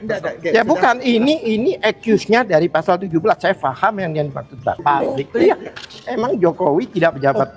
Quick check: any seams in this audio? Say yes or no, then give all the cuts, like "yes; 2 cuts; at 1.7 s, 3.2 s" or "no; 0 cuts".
yes; 1 cut; at 4.8 s